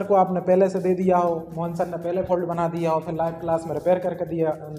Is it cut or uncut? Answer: uncut